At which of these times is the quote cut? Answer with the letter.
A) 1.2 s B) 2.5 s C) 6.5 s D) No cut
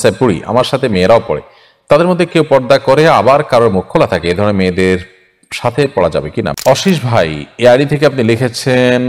C